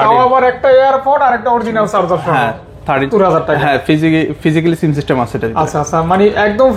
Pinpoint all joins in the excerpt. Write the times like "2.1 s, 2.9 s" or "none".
3.1 s